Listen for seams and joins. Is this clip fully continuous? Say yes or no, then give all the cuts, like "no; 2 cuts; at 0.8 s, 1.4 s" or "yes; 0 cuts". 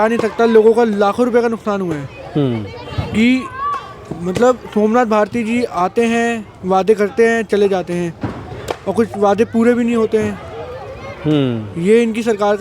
yes; 0 cuts